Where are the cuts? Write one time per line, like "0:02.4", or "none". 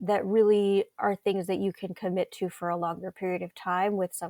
none